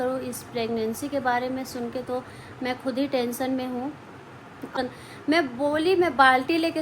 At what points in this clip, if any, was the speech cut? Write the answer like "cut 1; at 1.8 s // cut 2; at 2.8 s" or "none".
cut 1; at 4.8 s